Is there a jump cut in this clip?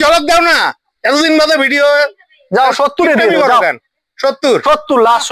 no; 0 cuts

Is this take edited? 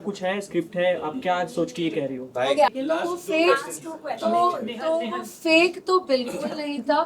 yes; 1 cut; at 2.7 s

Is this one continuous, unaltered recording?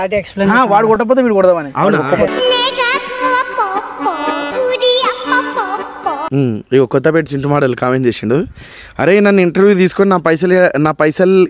no; 2 cuts; at 2.3 s, 6.2 s

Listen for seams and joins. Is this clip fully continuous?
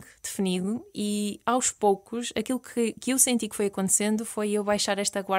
yes; 0 cuts

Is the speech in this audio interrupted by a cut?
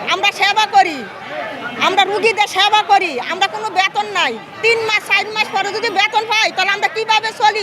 no; 0 cuts

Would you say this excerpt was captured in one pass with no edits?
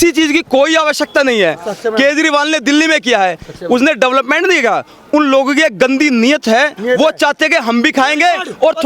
yes; 0 cuts

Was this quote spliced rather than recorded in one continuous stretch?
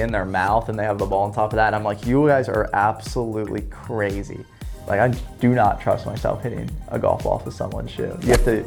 no; 0 cuts

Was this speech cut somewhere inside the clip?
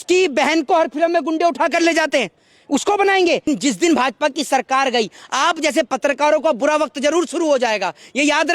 yes; 1 cut; at 3.5 s

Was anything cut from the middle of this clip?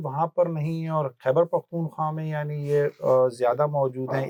no; 0 cuts

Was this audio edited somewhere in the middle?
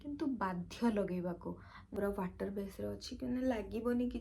yes; 1 cut; at 1.7 s

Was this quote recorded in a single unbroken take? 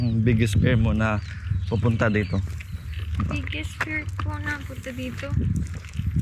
yes; 0 cuts

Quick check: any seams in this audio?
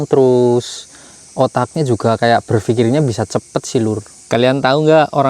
yes; 1 cut; at 4.1 s

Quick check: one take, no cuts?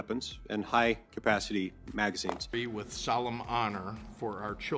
no; 1 cut; at 2.4 s

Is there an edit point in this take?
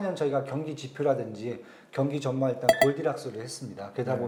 no; 0 cuts

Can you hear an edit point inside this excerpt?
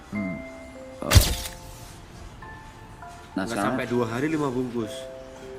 yes; 1 cut; at 1.2 s

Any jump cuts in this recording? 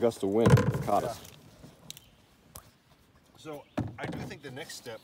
no; 0 cuts

